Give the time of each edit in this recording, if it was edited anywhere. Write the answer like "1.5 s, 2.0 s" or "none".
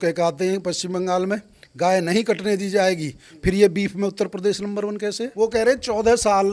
5.3 s